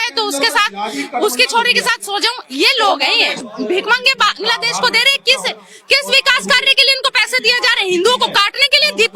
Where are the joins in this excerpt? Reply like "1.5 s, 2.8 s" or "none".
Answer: 3.4 s